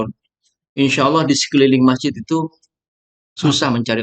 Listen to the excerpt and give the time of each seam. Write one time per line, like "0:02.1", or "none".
none